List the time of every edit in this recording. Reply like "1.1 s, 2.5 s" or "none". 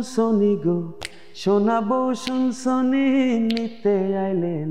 none